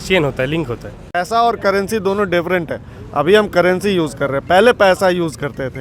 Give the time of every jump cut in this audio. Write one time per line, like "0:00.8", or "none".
0:01.1

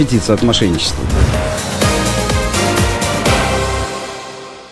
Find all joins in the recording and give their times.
0:01.1

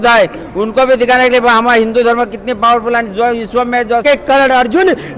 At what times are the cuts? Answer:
0:04.0

